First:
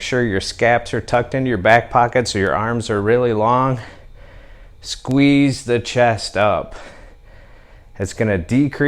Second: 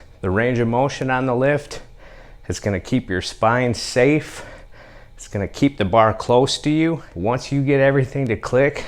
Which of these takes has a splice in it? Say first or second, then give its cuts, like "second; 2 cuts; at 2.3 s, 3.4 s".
second; 1 cut; at 7.1 s